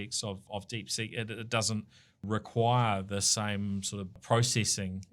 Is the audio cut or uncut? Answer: cut